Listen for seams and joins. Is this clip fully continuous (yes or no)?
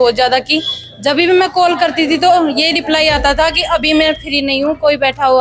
yes